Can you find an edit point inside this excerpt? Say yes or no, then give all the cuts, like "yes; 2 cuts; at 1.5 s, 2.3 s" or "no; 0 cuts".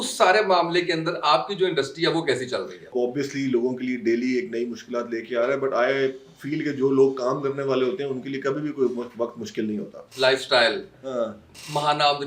yes; 2 cuts; at 2.9 s, 10.0 s